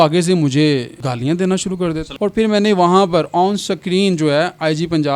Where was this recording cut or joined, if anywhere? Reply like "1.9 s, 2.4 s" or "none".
0.9 s, 2.1 s